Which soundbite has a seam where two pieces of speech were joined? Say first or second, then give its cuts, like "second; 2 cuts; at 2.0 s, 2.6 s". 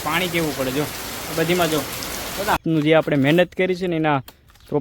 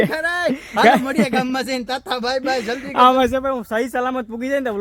first; 1 cut; at 2.6 s